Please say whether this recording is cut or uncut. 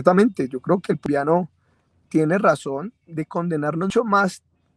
cut